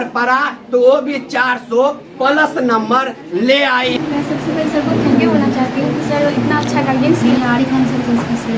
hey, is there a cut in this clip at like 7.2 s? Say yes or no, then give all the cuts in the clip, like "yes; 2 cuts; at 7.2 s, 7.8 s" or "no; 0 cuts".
yes; 2 cuts; at 3.9 s, 7.2 s